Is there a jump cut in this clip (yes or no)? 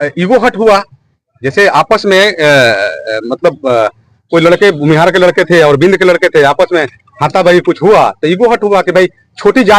no